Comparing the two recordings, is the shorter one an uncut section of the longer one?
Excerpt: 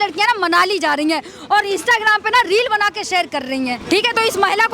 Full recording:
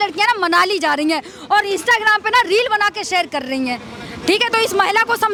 no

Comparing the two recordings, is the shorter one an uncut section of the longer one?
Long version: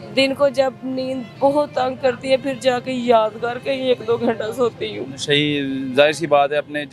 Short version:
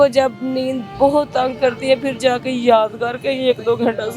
yes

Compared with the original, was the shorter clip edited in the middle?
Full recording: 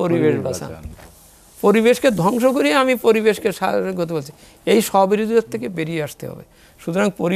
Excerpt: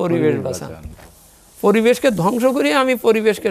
no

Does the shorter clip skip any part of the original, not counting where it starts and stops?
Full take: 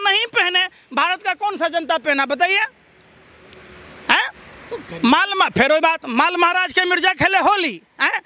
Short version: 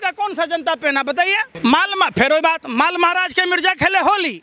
yes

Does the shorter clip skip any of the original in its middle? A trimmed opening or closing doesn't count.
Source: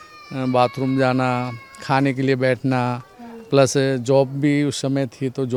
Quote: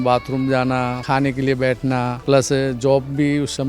yes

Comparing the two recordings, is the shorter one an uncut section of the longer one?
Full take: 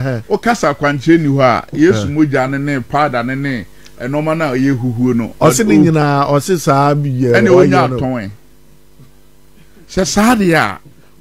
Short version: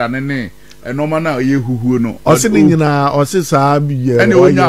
yes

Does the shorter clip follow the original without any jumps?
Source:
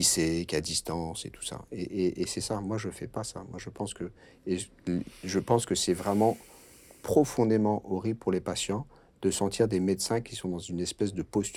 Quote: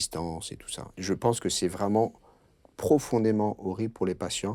no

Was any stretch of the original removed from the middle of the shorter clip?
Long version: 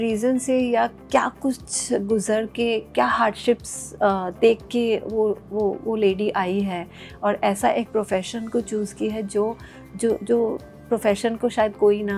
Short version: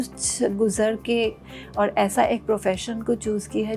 yes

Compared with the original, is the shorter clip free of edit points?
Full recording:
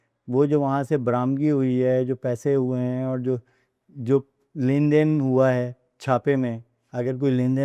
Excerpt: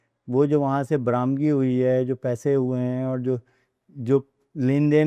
yes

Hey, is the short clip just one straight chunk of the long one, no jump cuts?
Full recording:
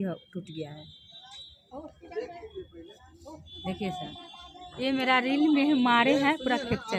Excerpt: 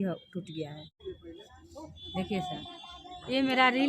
no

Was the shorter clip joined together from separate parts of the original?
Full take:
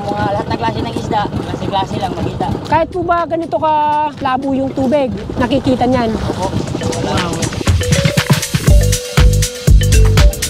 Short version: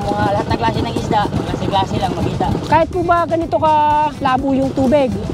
no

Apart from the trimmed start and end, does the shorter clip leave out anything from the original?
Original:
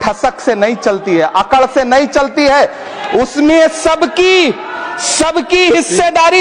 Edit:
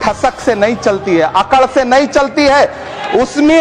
no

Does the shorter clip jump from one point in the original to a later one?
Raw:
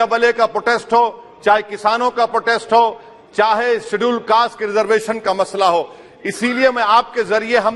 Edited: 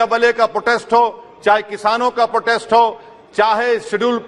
no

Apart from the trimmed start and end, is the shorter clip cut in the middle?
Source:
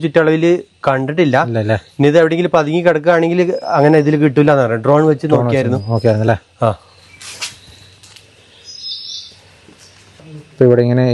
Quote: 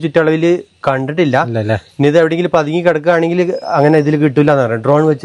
no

